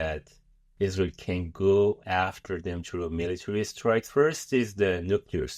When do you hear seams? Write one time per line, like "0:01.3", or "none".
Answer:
0:04.1